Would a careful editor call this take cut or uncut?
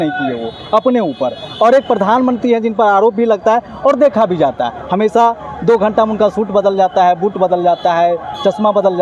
uncut